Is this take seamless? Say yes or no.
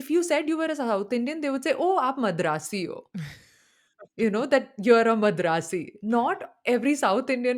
yes